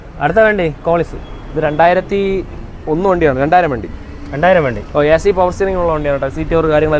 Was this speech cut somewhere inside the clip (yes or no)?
no